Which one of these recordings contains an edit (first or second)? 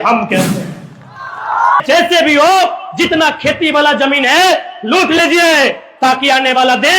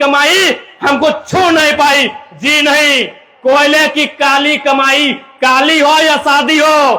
first